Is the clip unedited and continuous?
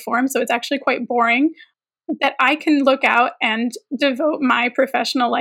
no; 1 cut; at 1.7 s

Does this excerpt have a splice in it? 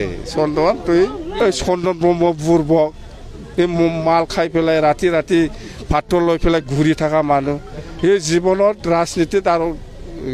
yes; 1 cut; at 1.3 s

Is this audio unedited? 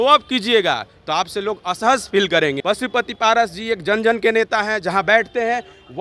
no; 1 cut; at 2.6 s

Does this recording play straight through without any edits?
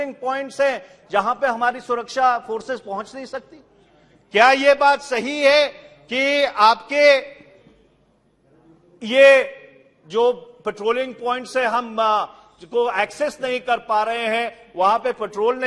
yes; 0 cuts

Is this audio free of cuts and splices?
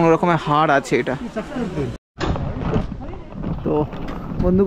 no; 1 cut; at 2.0 s

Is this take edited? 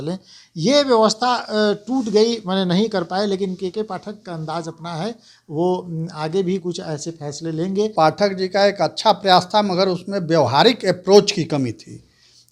yes; 1 cut; at 7.9 s

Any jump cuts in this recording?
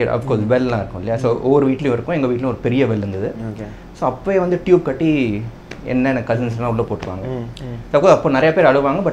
no; 0 cuts

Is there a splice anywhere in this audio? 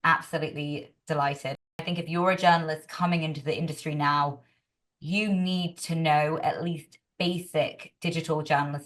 yes; 1 cut; at 1.8 s

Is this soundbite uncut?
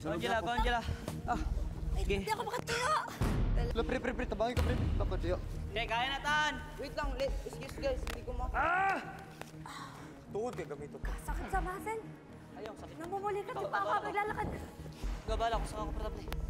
no; 1 cut; at 3.7 s

